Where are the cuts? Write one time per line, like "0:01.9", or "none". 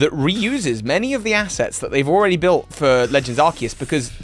0:02.7